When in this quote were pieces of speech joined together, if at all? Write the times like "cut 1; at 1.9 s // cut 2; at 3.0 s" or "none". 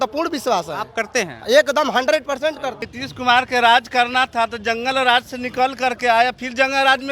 cut 1; at 2.8 s